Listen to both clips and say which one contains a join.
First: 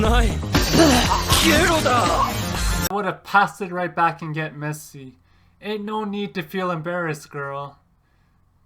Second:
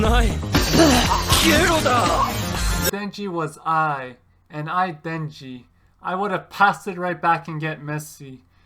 first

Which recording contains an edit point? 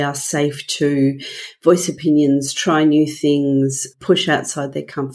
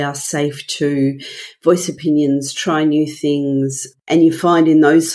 second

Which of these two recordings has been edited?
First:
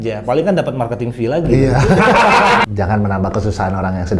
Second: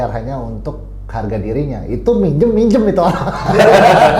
first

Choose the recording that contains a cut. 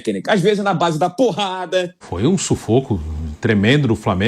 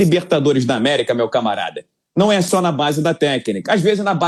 first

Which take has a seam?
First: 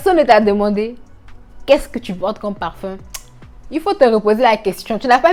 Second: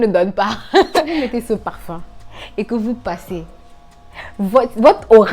second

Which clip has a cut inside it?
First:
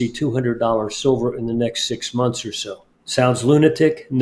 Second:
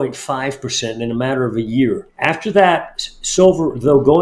second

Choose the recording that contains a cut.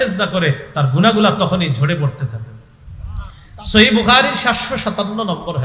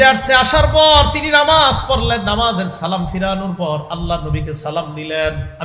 first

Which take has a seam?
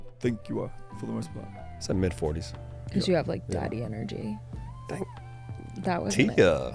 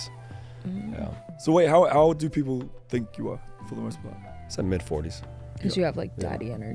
second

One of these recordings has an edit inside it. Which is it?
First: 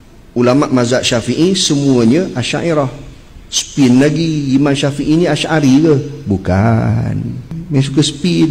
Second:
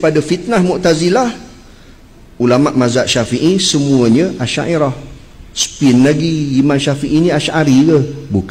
first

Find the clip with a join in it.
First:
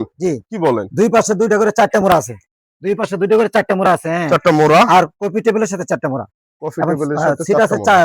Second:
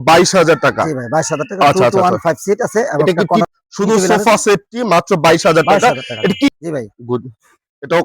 second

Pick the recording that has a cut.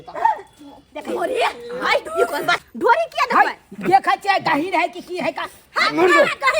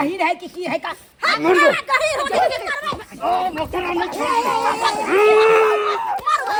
first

